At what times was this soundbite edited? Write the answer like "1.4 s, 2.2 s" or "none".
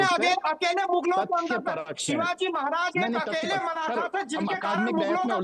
none